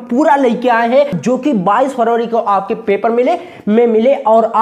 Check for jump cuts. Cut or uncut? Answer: cut